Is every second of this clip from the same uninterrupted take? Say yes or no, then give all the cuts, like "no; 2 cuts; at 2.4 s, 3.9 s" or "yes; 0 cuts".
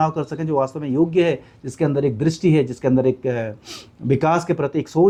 yes; 0 cuts